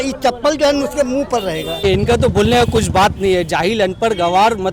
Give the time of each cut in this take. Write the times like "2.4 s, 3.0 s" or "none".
1.8 s